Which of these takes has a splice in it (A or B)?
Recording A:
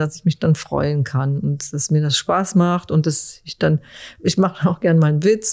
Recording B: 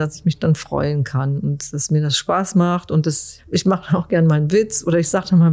B